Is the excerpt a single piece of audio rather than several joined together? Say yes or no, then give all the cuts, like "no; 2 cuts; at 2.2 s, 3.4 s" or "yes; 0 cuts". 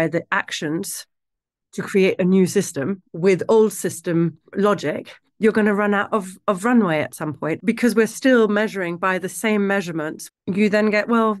no; 3 cuts; at 3.0 s, 7.6 s, 10.2 s